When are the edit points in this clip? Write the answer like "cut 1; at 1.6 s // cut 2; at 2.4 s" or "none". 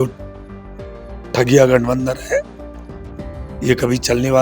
none